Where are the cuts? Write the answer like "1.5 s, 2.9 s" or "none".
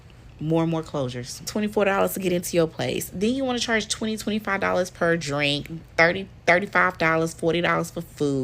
1.5 s